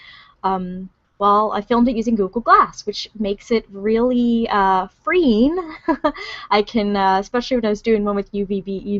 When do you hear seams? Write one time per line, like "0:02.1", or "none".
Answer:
0:01.8